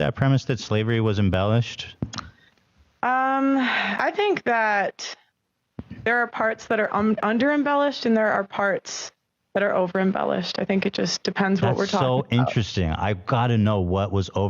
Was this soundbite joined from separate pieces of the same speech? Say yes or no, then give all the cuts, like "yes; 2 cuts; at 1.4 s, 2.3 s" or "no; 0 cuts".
yes; 2 cuts; at 1.8 s, 3.9 s